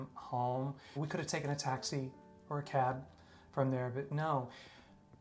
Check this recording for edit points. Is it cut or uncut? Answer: cut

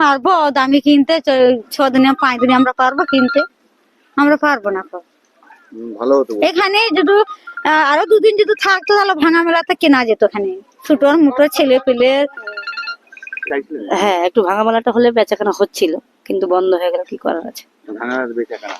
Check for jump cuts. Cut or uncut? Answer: cut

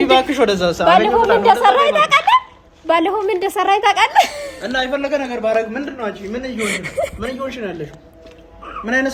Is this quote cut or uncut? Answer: uncut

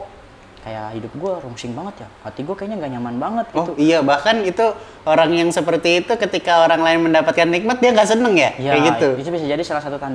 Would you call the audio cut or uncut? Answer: uncut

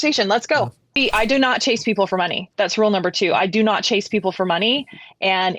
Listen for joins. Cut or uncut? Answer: cut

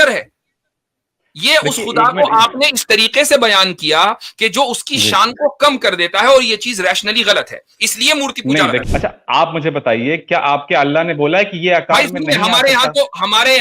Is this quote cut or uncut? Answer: cut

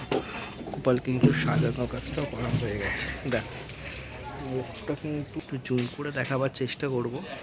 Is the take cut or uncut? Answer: cut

